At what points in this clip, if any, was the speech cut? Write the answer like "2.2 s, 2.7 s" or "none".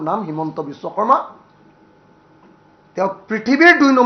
none

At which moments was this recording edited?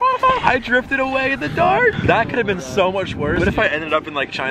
3.4 s

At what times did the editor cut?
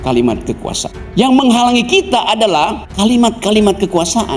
0.9 s, 2.8 s

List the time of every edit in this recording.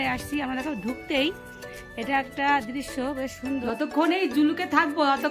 3.7 s

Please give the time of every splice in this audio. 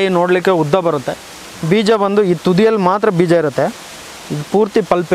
none

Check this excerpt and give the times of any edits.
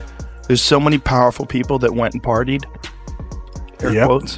3.2 s

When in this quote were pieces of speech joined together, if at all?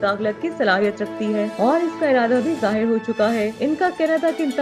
none

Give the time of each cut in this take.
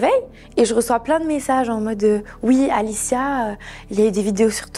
none

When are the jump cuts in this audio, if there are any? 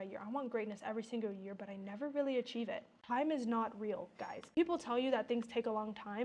2.9 s, 4.5 s

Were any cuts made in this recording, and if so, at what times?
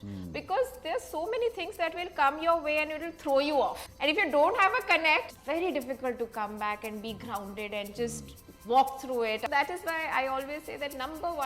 3.9 s, 5.3 s, 9.5 s

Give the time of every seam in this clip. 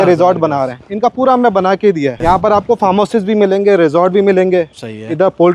2.2 s

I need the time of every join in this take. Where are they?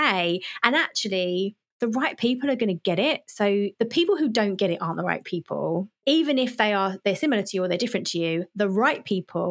1.6 s, 3.7 s, 6.0 s

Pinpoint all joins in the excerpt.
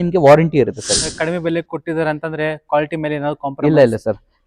1.1 s

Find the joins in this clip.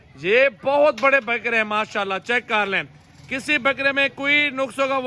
none

